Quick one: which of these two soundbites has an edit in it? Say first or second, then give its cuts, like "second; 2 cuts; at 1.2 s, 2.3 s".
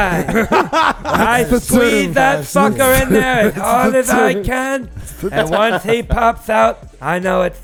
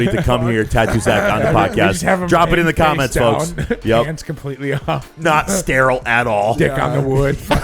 second; 1 cut; at 5.1 s